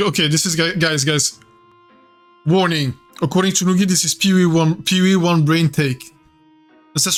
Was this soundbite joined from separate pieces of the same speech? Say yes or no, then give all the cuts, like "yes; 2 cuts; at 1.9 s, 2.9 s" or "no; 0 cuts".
no; 0 cuts